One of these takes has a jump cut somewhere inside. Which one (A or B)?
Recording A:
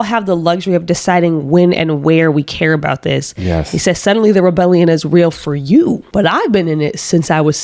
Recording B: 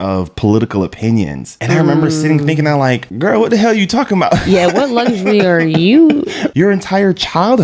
B